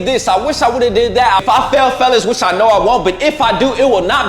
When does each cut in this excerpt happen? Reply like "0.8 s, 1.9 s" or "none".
1.4 s